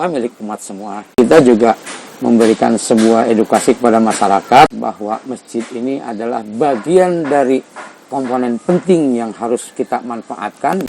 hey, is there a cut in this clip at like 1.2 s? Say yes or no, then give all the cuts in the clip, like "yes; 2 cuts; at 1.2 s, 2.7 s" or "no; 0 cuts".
yes; 2 cuts; at 1.2 s, 4.7 s